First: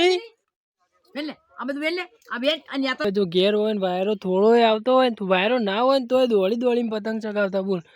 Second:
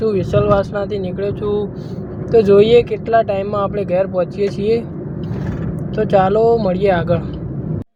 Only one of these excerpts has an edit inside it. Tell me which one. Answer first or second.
first